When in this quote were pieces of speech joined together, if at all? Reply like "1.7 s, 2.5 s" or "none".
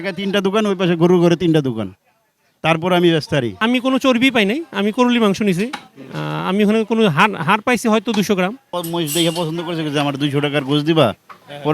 3.5 s, 8.7 s